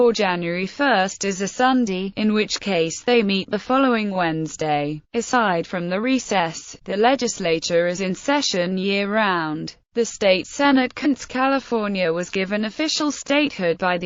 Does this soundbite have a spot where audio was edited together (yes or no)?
no